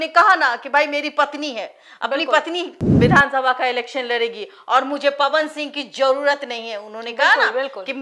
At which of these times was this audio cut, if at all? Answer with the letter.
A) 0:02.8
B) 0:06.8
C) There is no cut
A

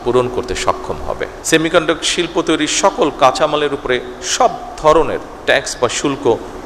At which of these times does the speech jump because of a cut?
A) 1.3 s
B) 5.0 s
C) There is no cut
A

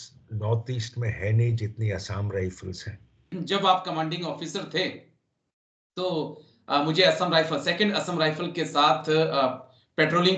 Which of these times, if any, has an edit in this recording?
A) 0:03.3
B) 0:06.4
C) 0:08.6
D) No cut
A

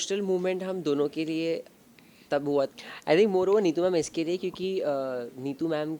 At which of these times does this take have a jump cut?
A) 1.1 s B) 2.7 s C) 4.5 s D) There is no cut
B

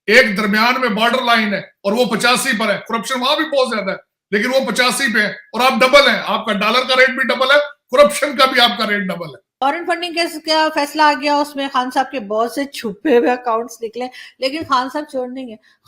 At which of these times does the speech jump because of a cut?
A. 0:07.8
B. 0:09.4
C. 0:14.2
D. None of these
B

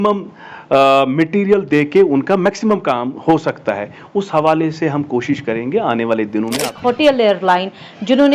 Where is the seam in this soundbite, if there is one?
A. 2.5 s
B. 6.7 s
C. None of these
B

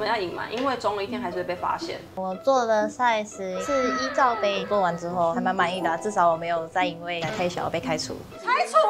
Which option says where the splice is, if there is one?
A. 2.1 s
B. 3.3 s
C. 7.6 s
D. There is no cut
A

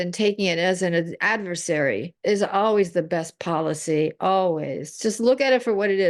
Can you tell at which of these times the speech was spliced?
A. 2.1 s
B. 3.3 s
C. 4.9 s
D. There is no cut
A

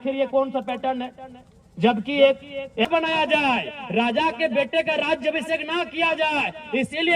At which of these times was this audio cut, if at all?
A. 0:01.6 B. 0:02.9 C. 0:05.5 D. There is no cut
B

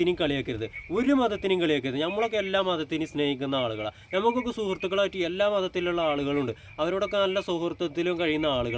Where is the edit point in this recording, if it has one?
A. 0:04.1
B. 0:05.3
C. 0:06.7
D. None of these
D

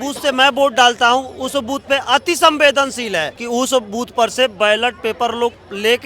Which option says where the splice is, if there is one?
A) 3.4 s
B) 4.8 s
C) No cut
A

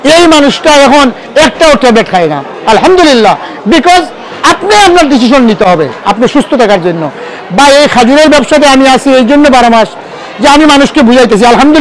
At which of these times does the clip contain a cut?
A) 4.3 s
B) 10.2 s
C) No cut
C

